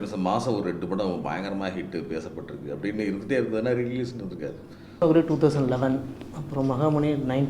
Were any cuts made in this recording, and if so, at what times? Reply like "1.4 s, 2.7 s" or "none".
5.0 s